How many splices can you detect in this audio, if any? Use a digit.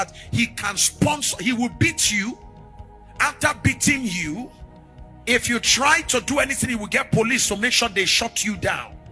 0